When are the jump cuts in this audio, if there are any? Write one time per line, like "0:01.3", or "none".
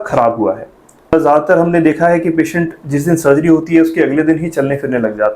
0:01.2